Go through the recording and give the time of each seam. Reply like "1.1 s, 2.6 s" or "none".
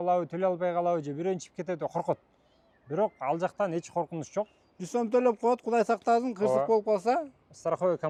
none